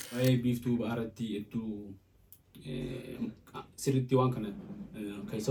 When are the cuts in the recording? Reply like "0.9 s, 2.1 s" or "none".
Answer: none

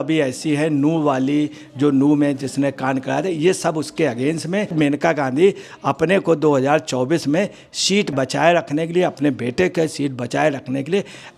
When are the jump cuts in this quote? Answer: 4.7 s, 8.1 s

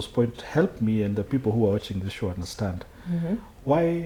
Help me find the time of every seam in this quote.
none

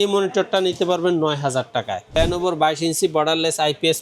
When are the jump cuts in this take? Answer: 2.1 s

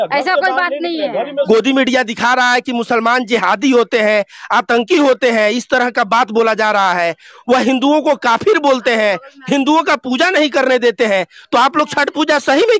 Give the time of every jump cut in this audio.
1.5 s

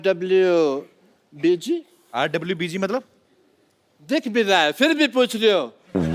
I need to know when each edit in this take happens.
none

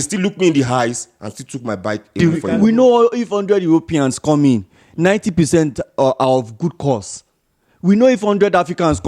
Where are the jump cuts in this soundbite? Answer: 2.2 s

